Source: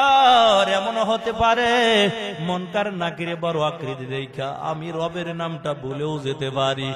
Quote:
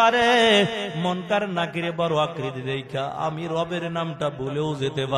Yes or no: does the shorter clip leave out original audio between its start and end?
no